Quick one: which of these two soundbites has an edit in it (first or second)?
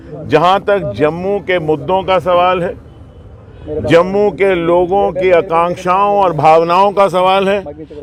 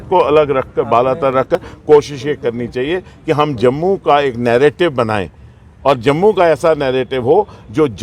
second